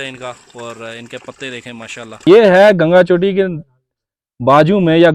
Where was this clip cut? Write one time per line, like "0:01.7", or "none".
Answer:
0:02.3